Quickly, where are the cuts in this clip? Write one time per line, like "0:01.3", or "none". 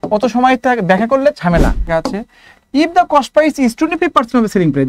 0:01.9